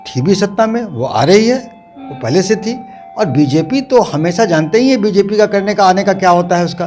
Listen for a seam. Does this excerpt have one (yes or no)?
no